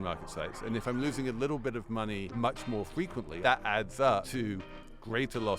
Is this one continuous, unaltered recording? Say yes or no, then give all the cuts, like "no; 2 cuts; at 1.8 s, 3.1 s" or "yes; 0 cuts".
no; 3 cuts; at 2.3 s, 3.4 s, 4.3 s